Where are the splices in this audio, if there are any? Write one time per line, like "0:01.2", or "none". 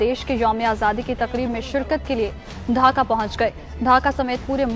none